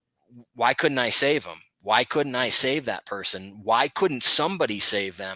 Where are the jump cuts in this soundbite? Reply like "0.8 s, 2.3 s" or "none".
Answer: none